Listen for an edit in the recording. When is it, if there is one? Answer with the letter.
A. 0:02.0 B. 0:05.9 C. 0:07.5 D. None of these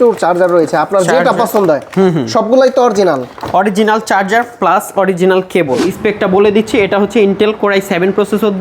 B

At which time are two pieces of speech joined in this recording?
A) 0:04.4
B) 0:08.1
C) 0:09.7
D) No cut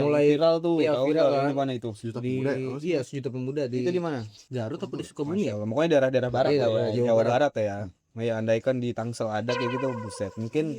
A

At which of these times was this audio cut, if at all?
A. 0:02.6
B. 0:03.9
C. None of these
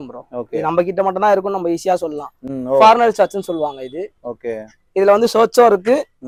C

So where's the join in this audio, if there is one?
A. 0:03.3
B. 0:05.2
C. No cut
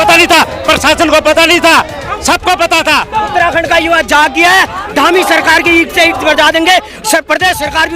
A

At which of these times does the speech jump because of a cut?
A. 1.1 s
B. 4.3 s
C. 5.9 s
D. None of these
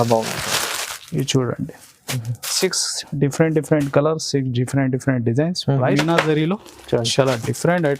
C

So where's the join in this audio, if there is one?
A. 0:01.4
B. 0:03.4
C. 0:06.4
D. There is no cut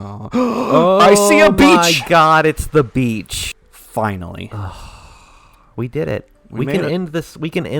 B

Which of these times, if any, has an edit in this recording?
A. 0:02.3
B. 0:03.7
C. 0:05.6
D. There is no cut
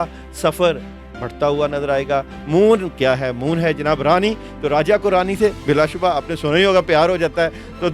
A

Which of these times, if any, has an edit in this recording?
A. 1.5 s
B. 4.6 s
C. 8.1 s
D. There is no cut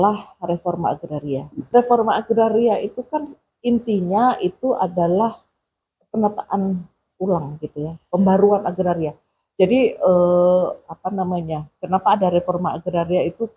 A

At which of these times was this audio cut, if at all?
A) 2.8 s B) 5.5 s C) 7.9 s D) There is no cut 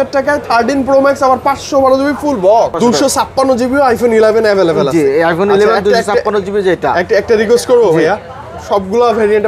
A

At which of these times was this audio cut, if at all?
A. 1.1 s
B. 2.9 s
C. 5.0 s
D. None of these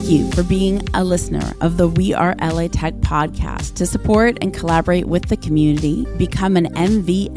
D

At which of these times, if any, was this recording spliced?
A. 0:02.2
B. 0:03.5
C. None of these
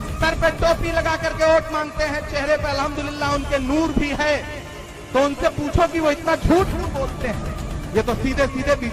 C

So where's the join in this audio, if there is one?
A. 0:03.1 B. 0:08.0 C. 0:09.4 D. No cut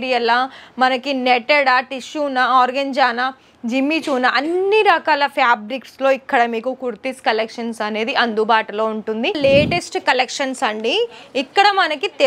C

